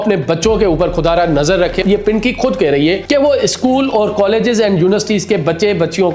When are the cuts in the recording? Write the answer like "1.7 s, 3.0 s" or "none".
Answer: 1.8 s, 3.0 s

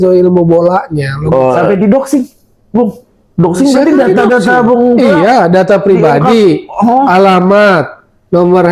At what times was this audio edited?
1.6 s

